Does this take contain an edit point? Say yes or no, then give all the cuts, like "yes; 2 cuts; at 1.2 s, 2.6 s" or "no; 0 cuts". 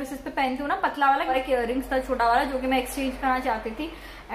yes; 1 cut; at 1.3 s